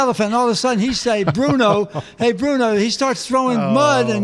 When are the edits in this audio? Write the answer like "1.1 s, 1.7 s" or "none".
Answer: none